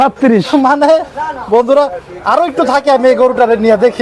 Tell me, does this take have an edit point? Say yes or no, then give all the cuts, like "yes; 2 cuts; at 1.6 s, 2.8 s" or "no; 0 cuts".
no; 0 cuts